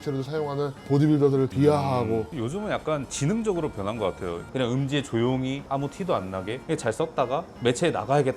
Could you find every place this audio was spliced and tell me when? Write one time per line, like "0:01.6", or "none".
0:02.3
0:05.7
0:06.6